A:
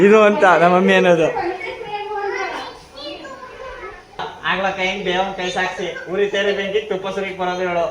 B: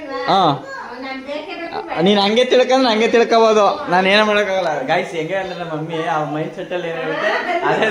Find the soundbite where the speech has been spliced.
A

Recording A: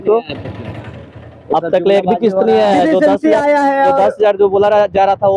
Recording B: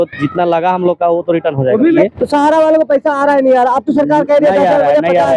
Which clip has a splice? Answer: B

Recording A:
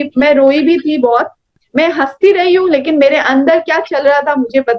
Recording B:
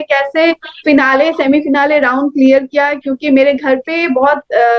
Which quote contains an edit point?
A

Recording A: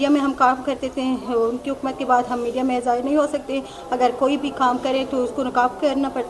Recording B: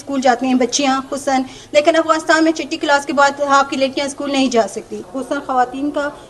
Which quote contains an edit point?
B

